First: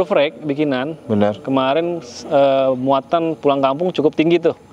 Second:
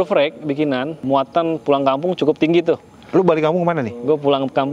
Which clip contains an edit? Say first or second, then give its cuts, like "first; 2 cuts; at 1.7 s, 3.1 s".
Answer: second; 1 cut; at 1.0 s